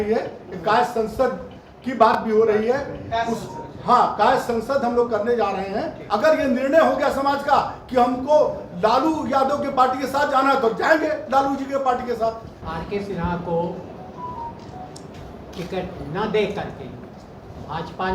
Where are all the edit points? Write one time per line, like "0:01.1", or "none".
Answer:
0:06.0
0:12.5

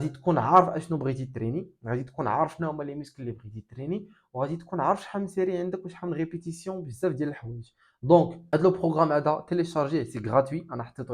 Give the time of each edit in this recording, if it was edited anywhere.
0:08.4

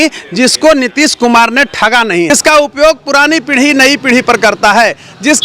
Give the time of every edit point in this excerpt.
0:02.3

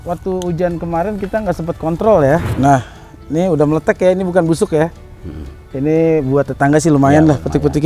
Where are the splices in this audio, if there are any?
0:02.5

